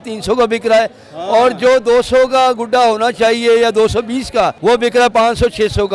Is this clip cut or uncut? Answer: cut